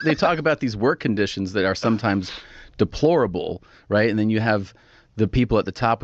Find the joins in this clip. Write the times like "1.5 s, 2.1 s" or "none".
none